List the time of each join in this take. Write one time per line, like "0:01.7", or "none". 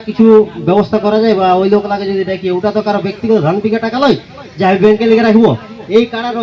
none